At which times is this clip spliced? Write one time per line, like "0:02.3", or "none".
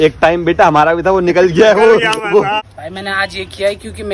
0:02.6

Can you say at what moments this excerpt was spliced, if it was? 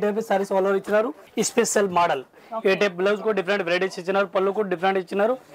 0:01.2

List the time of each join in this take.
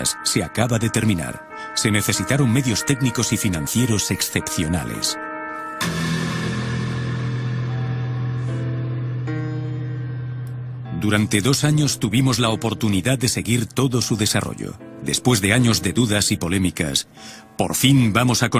0:15.6

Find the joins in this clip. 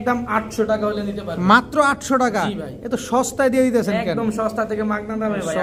none

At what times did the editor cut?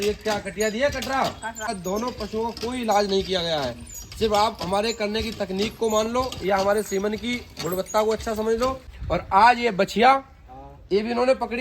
0:01.7
0:08.9

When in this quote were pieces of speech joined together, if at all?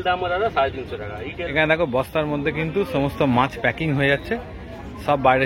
0:01.5

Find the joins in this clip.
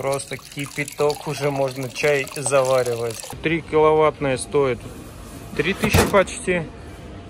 0:03.4

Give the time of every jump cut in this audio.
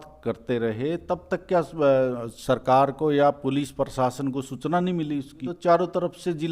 0:05.5

